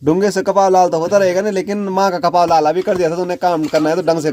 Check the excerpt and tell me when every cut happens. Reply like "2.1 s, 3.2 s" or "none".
none